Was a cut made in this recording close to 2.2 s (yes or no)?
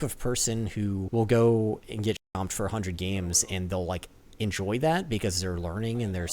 yes